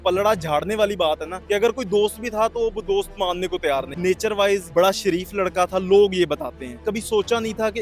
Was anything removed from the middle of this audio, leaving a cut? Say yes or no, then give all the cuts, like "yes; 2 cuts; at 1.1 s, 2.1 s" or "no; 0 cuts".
yes; 4 cuts; at 1.3 s, 3.9 s, 4.7 s, 6.8 s